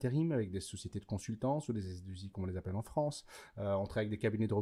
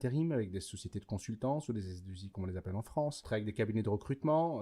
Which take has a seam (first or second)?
second